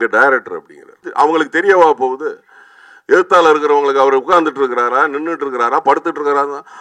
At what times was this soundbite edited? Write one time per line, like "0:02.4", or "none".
0:01.0